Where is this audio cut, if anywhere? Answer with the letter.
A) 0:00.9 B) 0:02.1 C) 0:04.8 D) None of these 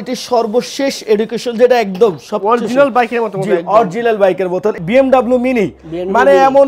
C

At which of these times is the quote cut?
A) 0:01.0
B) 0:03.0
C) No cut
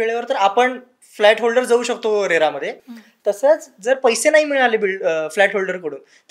C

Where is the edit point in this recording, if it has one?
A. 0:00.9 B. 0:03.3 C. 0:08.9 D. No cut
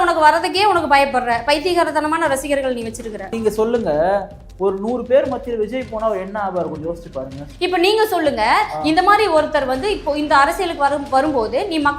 B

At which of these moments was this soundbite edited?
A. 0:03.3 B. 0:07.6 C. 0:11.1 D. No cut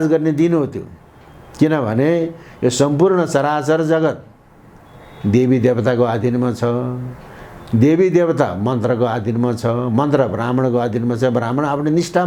D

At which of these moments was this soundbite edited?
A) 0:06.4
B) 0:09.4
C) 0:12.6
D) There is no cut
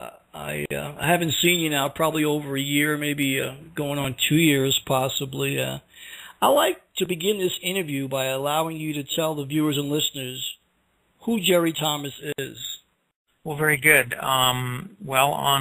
D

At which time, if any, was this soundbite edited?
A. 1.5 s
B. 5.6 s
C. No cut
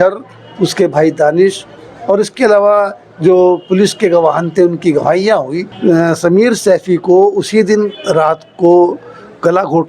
B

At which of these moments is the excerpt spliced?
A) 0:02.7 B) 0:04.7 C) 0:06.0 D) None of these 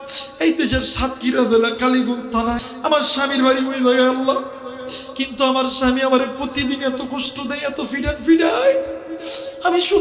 A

